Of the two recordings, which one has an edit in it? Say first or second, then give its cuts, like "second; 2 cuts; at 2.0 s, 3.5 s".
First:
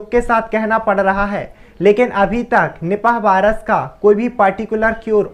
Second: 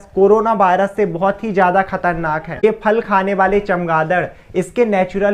second; 1 cut; at 2.6 s